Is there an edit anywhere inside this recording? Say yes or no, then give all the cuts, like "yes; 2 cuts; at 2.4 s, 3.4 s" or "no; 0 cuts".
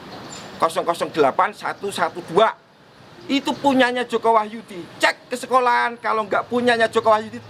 no; 0 cuts